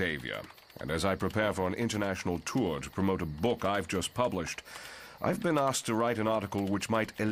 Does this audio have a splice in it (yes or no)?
no